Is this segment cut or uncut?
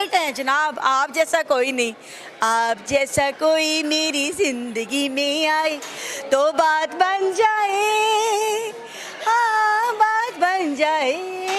uncut